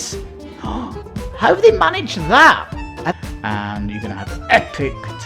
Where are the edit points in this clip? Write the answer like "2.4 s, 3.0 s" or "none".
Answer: 3.1 s